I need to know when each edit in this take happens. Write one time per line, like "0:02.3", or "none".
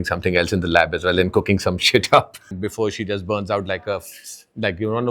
0:02.5